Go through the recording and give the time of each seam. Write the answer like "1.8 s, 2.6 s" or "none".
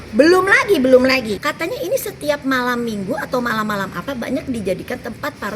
1.3 s

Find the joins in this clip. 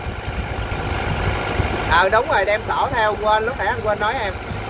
none

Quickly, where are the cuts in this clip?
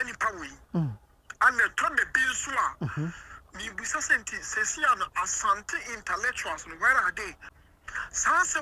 7.4 s

